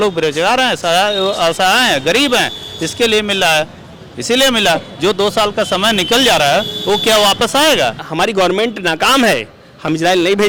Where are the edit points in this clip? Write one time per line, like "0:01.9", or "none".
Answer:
0:08.0